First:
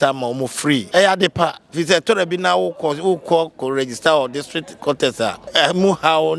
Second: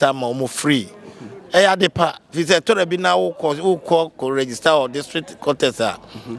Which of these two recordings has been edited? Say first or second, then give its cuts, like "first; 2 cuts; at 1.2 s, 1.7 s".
first; 2 cuts; at 0.9 s, 5.4 s